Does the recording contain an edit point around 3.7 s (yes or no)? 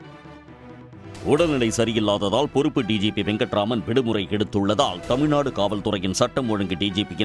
no